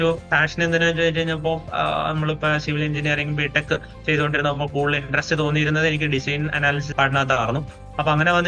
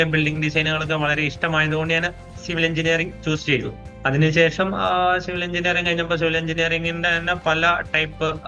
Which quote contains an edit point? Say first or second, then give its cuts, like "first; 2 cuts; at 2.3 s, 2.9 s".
second; 1 cut; at 3.8 s